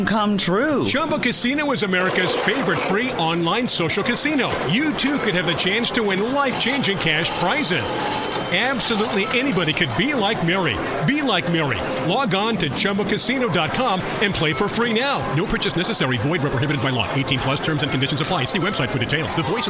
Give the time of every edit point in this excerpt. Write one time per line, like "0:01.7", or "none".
none